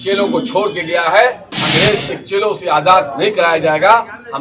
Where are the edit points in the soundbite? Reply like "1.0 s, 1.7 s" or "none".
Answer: 1.5 s